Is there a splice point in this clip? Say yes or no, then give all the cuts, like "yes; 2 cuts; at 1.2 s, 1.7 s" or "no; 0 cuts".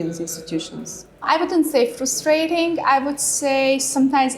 yes; 1 cut; at 1.2 s